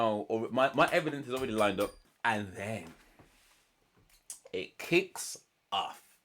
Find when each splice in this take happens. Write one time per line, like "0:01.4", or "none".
0:02.0